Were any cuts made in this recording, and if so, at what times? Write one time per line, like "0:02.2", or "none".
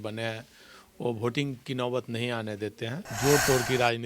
0:03.0